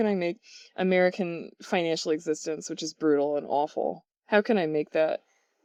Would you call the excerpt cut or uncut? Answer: uncut